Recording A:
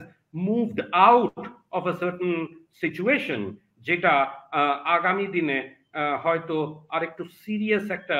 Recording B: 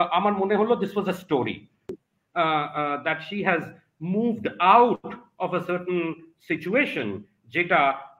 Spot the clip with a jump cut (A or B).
B